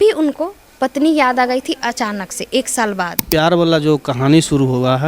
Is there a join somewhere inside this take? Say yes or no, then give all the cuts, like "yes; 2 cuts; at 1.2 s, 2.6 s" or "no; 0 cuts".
yes; 1 cut; at 3.3 s